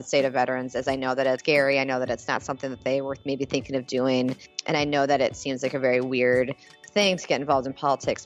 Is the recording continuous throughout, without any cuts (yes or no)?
no